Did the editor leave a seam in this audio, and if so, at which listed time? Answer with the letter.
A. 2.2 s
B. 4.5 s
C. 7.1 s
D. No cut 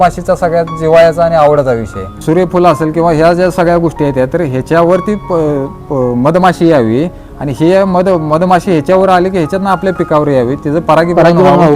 A